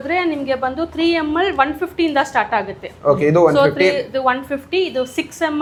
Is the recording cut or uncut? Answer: uncut